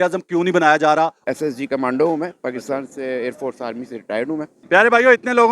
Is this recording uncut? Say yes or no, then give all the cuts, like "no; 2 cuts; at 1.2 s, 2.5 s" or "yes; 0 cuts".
no; 2 cuts; at 1.3 s, 4.5 s